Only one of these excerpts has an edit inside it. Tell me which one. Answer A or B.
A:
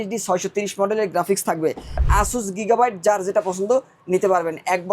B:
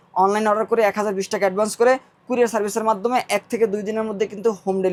A